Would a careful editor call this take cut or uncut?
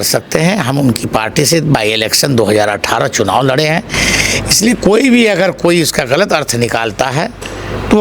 uncut